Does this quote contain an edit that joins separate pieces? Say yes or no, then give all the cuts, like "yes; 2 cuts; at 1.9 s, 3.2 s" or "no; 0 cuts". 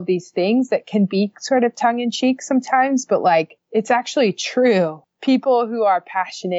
yes; 1 cut; at 3.6 s